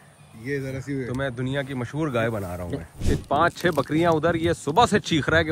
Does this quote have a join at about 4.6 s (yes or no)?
no